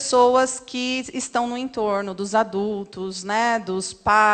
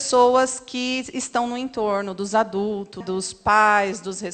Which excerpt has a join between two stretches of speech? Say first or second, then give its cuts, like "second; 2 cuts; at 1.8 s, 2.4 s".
second; 1 cut; at 3.0 s